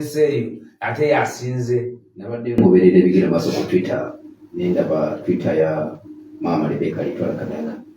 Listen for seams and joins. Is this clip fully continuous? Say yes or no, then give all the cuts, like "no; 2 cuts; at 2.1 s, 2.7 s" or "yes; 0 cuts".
yes; 0 cuts